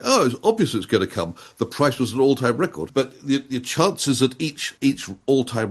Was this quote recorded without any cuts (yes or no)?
no